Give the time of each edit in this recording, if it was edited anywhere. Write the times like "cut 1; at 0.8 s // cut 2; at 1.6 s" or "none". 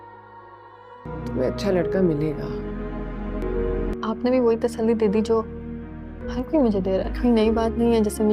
cut 1; at 1.0 s